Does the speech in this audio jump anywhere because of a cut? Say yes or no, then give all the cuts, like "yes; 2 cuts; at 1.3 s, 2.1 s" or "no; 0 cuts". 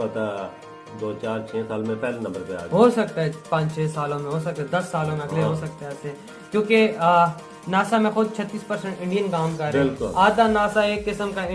no; 0 cuts